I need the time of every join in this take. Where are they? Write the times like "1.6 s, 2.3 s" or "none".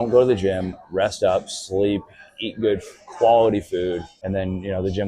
4.1 s